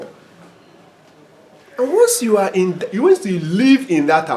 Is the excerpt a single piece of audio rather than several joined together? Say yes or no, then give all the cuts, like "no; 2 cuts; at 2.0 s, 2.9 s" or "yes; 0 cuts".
yes; 0 cuts